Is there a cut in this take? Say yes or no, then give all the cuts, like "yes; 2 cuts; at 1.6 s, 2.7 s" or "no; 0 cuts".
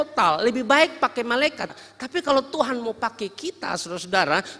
yes; 1 cut; at 1.7 s